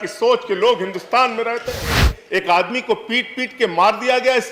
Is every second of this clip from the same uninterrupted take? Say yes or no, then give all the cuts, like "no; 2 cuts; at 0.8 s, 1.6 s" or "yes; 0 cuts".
no; 1 cut; at 2.1 s